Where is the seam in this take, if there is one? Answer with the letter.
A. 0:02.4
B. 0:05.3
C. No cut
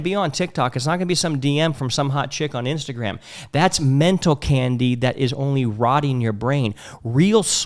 C